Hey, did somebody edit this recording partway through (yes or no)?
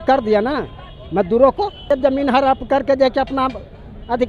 yes